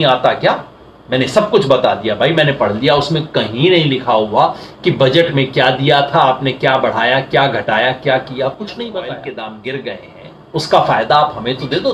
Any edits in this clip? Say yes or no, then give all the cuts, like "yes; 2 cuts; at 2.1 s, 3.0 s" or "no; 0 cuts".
yes; 1 cut; at 9.2 s